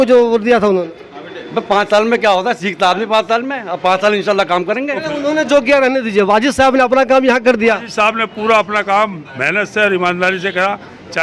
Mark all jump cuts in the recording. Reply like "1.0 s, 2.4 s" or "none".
5.1 s